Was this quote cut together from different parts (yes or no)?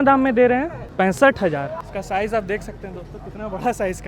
yes